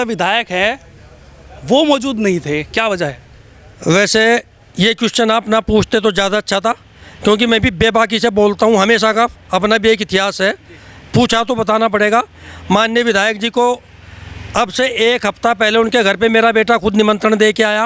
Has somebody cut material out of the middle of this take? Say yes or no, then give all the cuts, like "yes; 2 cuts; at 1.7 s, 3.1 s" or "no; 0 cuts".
no; 0 cuts